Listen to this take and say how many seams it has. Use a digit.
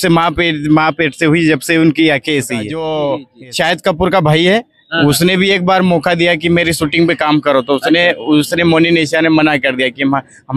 1